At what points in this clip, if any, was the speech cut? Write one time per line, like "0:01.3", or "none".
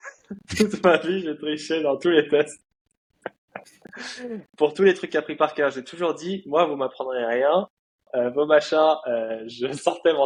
none